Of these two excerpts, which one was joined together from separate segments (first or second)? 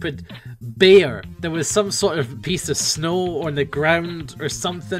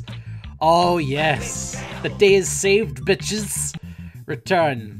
first